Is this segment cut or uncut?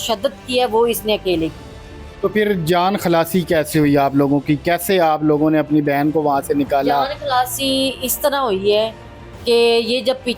uncut